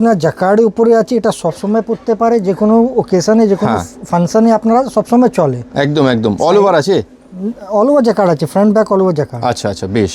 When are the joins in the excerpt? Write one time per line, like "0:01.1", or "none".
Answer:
none